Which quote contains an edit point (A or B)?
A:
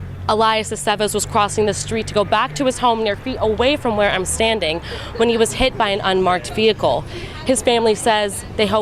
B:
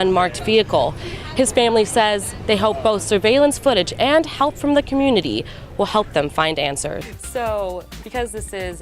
B